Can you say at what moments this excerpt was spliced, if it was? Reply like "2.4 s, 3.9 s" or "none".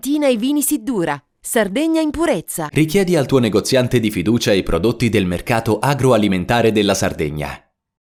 none